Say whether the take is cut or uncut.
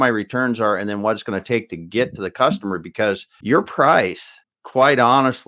cut